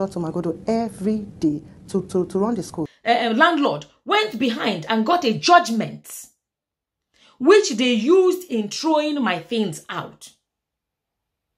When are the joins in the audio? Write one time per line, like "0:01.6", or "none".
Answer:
0:02.9